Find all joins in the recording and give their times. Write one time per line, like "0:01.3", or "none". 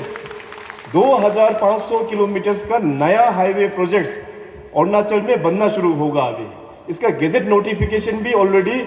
none